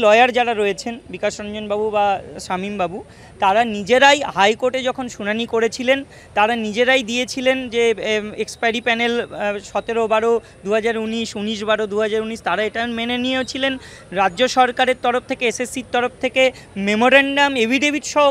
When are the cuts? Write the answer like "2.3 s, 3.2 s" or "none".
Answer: none